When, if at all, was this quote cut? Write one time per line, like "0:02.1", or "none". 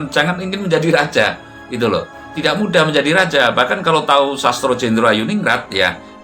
none